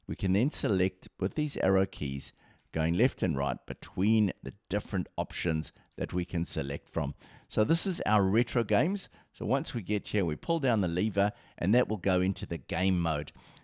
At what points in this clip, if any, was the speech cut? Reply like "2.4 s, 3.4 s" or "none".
none